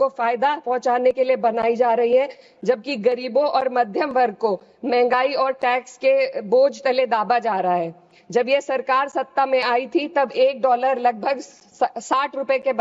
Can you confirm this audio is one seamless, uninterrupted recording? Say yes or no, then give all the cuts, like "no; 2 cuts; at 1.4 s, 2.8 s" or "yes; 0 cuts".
yes; 0 cuts